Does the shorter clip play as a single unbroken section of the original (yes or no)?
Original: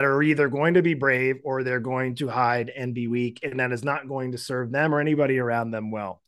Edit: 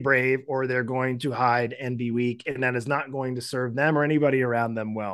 yes